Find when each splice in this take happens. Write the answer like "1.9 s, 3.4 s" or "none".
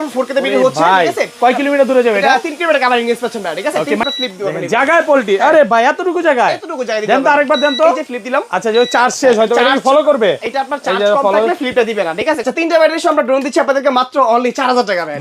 4.0 s, 12.4 s